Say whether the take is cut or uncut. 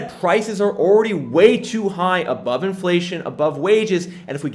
uncut